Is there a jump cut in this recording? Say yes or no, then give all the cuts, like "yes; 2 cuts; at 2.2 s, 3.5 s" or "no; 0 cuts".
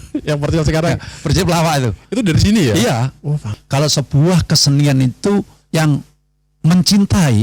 yes; 1 cut; at 3.4 s